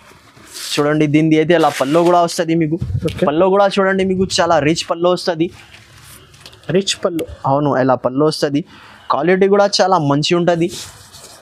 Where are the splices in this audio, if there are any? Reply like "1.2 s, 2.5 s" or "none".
none